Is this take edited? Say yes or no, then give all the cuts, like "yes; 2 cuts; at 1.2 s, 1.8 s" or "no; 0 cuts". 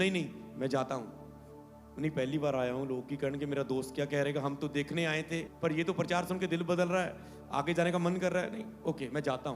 yes; 1 cut; at 5.5 s